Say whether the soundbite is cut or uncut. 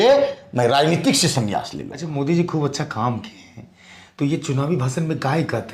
cut